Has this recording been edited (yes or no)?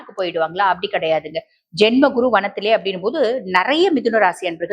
no